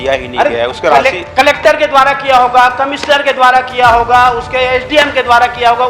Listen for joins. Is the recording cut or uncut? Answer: uncut